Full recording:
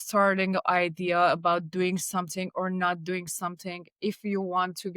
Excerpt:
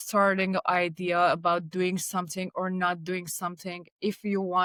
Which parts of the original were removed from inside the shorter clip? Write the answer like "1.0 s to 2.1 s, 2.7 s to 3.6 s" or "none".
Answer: none